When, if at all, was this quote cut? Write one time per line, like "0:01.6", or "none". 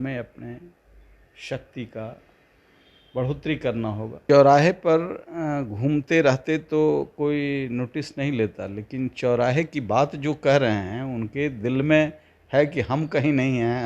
0:04.2

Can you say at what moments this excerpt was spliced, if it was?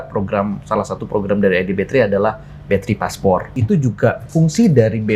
0:03.5

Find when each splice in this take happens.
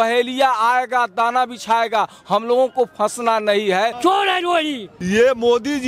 0:04.3

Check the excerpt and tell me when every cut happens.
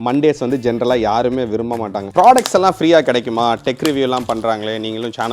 0:02.0

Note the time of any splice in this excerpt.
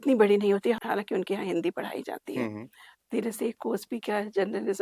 0:02.9

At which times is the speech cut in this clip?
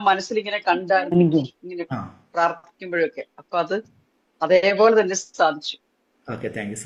none

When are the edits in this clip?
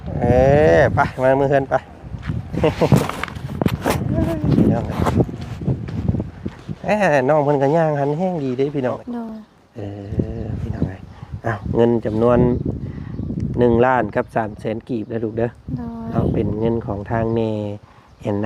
0:09.0

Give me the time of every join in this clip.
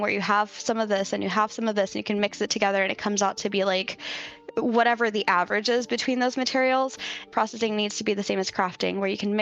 0:07.3

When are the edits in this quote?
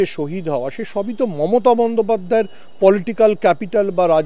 none

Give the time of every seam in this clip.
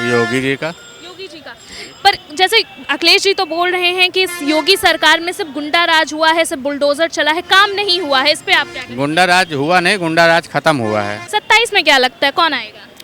0:11.2

